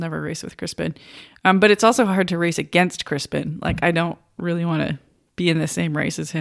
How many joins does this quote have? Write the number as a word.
zero